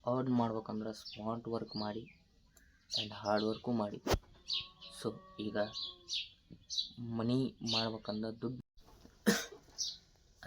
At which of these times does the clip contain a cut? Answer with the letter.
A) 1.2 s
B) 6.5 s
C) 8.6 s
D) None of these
C